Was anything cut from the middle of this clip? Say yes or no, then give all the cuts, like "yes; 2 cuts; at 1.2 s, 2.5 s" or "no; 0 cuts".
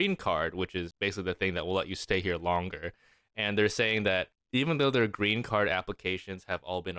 yes; 2 cuts; at 0.9 s, 4.4 s